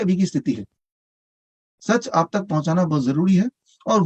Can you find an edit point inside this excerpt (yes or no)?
yes